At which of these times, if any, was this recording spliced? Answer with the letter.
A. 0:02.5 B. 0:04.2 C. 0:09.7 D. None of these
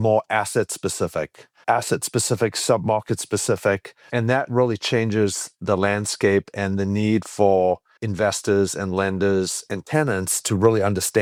D